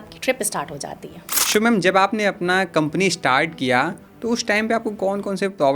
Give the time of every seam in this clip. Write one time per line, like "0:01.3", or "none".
0:01.3